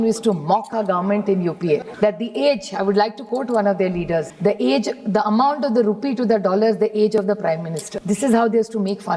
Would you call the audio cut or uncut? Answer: cut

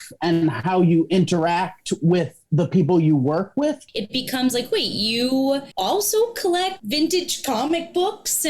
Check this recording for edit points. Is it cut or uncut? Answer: cut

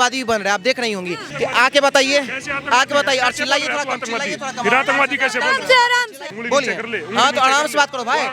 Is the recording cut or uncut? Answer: cut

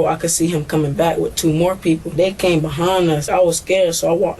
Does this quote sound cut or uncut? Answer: cut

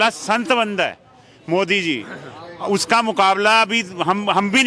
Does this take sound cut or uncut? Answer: uncut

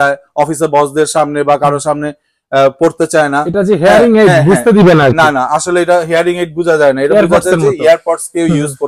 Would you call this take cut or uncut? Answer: uncut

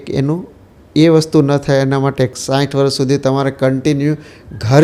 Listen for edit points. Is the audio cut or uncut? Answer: cut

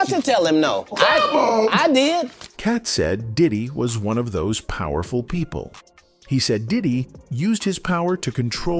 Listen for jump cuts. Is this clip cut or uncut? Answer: uncut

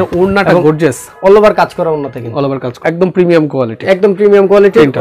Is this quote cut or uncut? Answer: cut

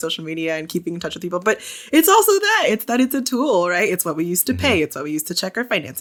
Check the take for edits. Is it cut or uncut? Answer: uncut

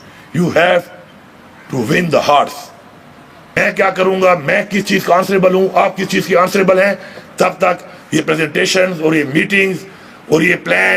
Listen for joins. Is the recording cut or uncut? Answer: cut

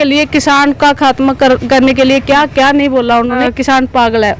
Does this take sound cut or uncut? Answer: cut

